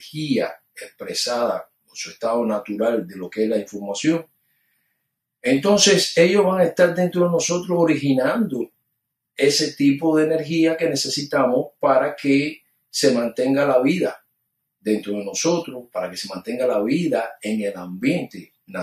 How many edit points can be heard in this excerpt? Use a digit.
0